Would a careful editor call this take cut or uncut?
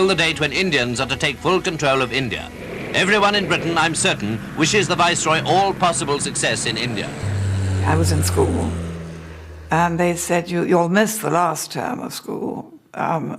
cut